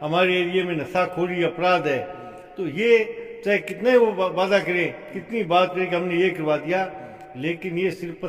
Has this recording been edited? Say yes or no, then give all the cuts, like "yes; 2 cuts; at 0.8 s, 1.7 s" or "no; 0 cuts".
no; 0 cuts